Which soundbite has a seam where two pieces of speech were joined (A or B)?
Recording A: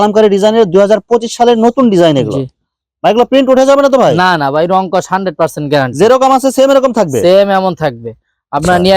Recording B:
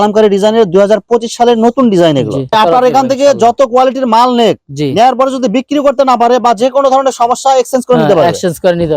B